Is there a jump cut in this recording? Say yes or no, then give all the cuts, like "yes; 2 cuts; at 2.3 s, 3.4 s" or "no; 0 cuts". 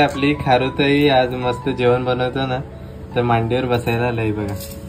no; 0 cuts